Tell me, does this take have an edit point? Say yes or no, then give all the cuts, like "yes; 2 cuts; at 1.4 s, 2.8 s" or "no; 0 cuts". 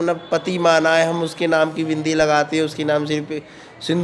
no; 0 cuts